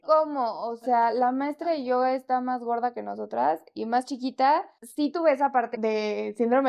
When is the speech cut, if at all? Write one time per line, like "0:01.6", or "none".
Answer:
0:04.8
0:05.7